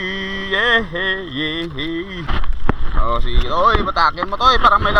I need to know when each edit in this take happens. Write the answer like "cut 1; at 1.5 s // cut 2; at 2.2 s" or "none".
cut 1; at 2.3 s